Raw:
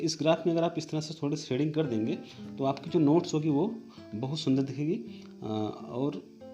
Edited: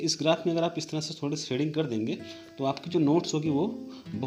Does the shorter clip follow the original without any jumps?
yes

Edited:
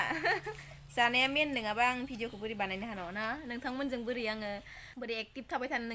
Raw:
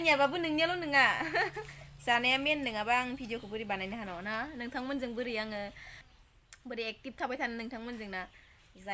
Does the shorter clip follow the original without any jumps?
no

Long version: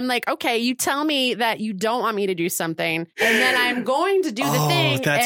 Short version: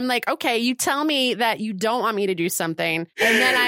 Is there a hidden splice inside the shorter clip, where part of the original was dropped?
no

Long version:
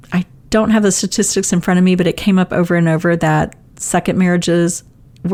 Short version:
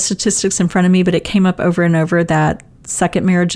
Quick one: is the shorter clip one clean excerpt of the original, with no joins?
yes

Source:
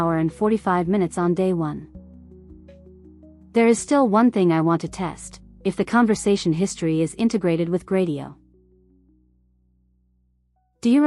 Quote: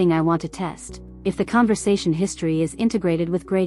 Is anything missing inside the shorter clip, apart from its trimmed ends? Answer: no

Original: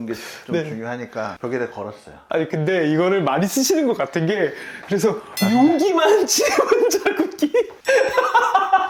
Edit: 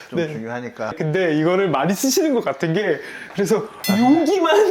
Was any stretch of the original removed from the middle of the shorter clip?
yes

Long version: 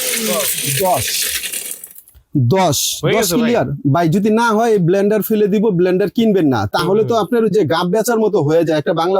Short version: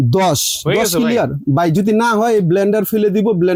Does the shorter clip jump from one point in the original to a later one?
no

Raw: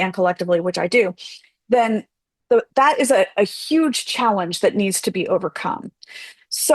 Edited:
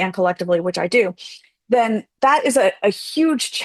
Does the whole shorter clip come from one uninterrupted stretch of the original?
no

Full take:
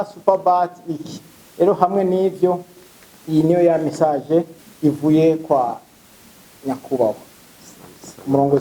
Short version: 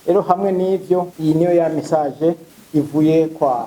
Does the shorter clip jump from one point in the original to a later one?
yes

